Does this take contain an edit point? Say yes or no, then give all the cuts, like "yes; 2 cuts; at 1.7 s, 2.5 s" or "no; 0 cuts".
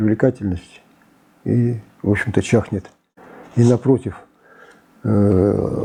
no; 0 cuts